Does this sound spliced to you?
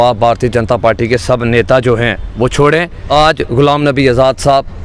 yes; 1 cut; at 3.0 s

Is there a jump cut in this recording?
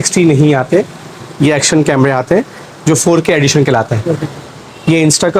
no; 0 cuts

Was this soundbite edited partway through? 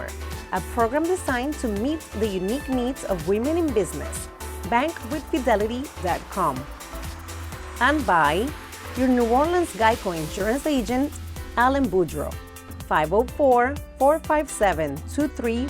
no; 0 cuts

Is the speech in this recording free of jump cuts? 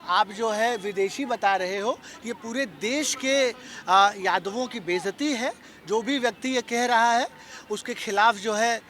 yes; 0 cuts

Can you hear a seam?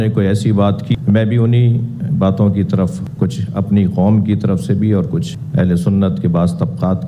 yes; 1 cut; at 0.9 s

